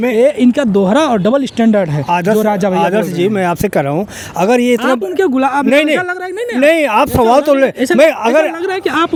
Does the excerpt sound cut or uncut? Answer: uncut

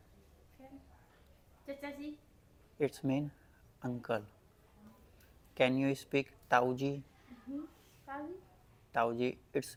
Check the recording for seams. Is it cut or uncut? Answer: uncut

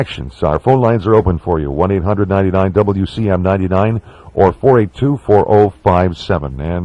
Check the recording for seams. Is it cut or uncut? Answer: cut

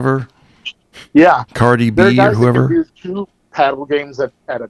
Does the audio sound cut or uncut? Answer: uncut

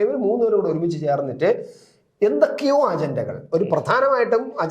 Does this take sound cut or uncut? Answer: uncut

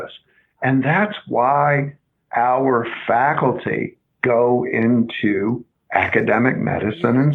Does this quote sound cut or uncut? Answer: cut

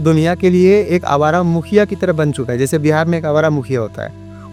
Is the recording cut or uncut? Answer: uncut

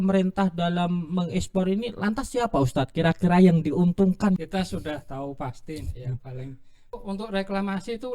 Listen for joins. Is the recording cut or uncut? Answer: cut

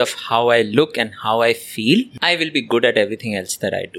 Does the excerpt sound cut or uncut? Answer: cut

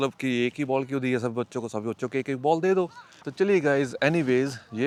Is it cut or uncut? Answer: uncut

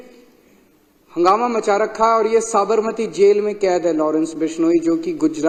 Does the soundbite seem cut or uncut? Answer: uncut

